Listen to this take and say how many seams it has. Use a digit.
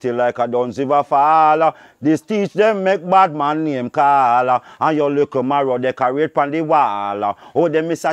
0